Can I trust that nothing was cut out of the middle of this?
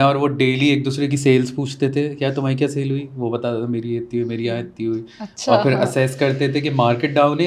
yes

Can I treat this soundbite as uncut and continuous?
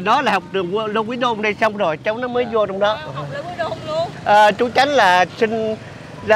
no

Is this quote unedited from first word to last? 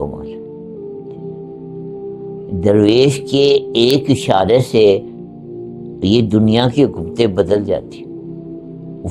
yes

